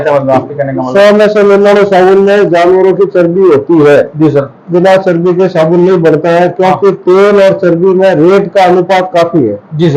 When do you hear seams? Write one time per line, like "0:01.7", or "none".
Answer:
0:00.9
0:04.6

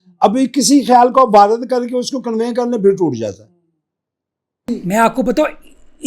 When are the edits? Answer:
0:04.7

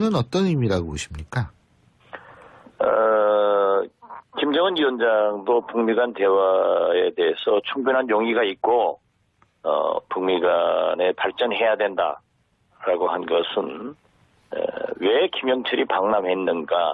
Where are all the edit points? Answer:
none

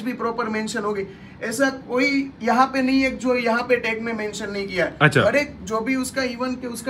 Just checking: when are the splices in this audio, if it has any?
none

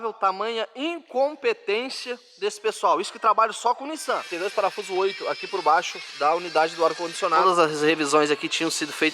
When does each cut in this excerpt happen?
0:04.3
0:07.4

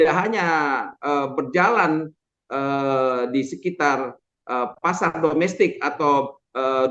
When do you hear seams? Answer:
none

